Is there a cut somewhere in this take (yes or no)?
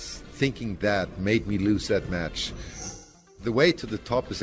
yes